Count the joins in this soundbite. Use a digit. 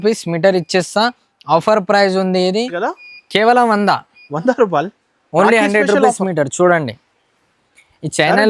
1